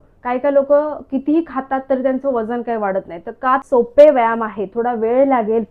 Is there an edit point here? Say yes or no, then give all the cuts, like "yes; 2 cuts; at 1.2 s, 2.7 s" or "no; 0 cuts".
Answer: yes; 1 cut; at 3.6 s